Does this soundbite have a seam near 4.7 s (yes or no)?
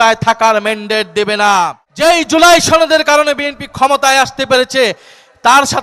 no